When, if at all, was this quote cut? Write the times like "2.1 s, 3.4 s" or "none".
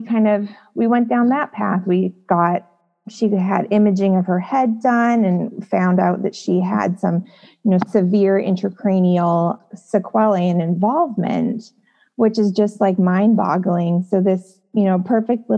9.6 s